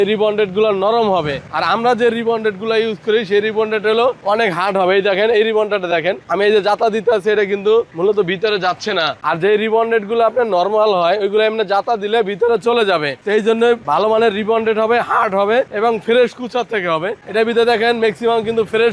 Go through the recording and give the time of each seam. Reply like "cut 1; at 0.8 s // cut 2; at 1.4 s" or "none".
none